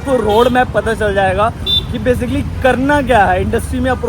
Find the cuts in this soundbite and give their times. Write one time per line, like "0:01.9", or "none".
none